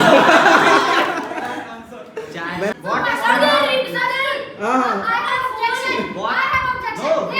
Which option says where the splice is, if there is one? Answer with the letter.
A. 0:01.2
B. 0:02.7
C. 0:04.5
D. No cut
B